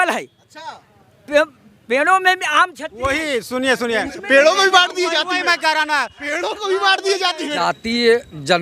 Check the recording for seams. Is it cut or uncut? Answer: cut